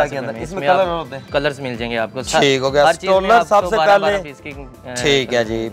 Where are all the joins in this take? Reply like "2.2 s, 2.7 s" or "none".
none